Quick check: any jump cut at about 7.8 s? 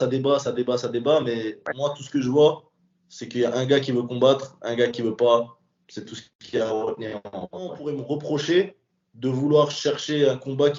yes; 1 cut; at 7.8 s

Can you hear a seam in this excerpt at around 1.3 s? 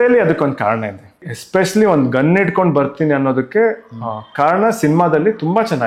yes; 1 cut; at 1.3 s

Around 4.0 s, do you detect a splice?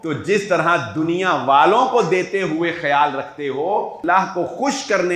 yes; 1 cut; at 4.0 s

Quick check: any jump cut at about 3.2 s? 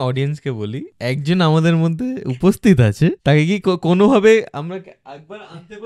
yes; 2 cuts; at 0.9 s, 3.2 s

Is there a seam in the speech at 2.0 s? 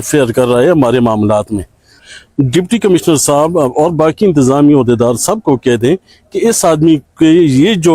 yes; 1 cut; at 2.0 s

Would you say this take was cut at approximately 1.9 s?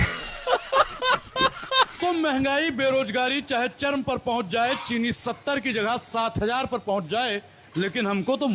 yes; 1 cut; at 1.9 s

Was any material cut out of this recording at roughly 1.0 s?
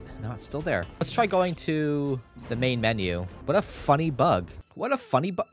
yes; 4 cuts; at 1.0 s, 2.3 s, 3.3 s, 4.6 s

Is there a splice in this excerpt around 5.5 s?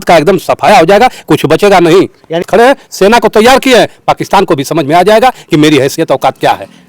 no; 1 cut; at 2.5 s

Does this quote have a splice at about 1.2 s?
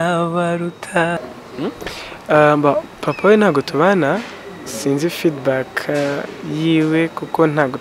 yes; 1 cut; at 1.2 s

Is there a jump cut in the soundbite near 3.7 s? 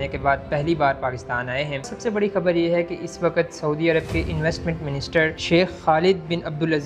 no; 2 cuts; at 1.8 s, 5.4 s

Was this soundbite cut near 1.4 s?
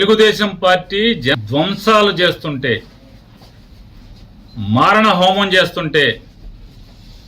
yes; 1 cut; at 1.4 s

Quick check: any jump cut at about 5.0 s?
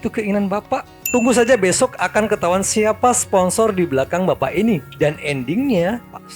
no; 1 cut; at 0.9 s

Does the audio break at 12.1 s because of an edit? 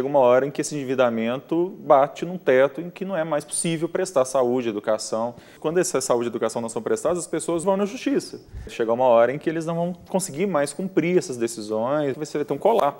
yes; 4 cuts; at 5.5 s, 7.6 s, 8.7 s, 12.1 s

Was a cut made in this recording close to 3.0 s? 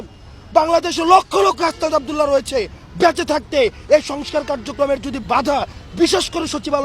no; 0 cuts

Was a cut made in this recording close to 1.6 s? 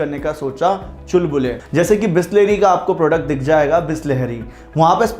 yes; 1 cut; at 1.6 s

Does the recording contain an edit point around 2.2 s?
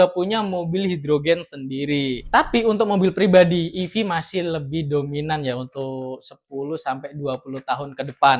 yes; 1 cut; at 2.2 s

